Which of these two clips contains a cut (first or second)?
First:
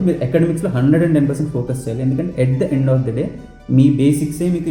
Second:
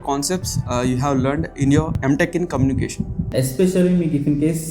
second